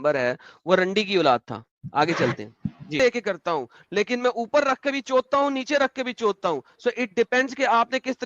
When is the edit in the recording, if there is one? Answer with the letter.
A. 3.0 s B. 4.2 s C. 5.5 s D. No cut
A